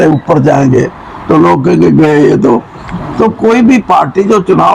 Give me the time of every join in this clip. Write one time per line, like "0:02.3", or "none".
none